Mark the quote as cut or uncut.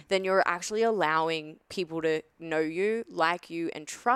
uncut